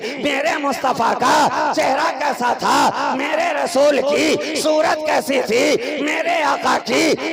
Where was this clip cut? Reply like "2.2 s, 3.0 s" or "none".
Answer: none